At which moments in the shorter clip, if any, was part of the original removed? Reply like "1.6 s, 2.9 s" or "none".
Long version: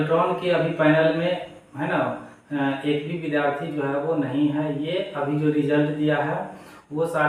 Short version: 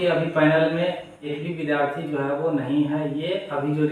1.3 s